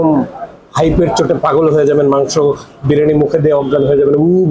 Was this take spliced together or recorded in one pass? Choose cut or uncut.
uncut